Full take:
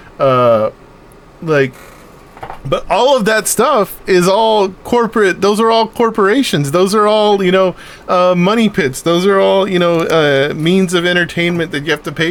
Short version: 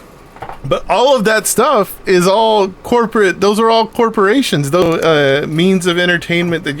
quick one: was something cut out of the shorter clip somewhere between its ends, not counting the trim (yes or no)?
yes